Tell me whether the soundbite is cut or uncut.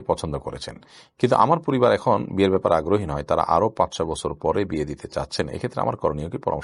uncut